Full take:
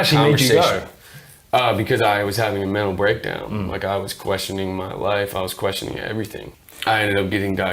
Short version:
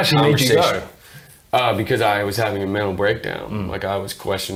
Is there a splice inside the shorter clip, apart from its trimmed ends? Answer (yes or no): no